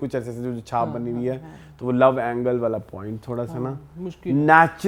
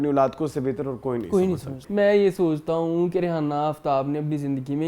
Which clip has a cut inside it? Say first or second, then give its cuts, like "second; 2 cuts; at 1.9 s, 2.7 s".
second; 1 cut; at 1.8 s